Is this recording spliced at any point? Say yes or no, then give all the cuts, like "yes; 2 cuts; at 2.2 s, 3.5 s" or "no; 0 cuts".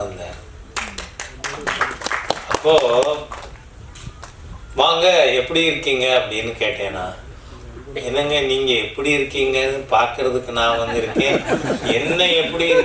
no; 0 cuts